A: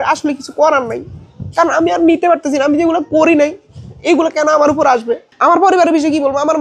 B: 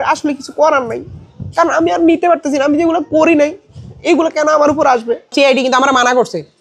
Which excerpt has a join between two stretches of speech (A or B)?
B